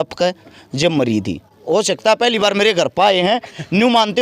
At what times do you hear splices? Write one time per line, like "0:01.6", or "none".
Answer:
0:01.6